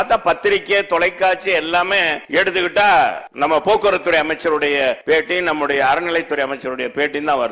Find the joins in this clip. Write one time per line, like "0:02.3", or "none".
0:02.2
0:03.2
0:05.0